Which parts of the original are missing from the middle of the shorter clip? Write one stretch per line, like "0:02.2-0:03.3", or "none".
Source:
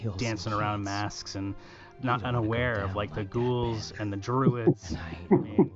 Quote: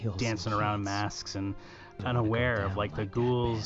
0:02.0-0:02.2